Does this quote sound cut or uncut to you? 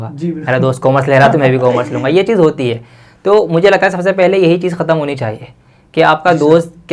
uncut